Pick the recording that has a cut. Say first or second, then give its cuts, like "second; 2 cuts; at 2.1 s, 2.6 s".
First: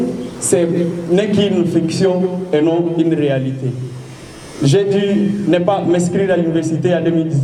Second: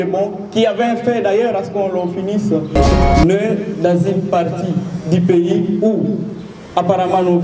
second; 1 cut; at 2.9 s